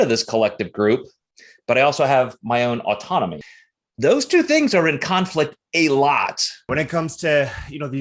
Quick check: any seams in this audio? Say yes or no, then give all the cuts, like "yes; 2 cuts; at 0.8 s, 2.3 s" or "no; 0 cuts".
yes; 2 cuts; at 3.4 s, 6.7 s